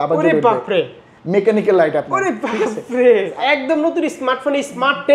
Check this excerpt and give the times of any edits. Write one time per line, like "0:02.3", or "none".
0:03.3